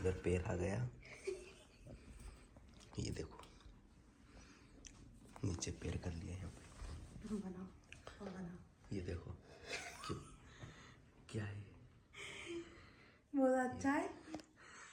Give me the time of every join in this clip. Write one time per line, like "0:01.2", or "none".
none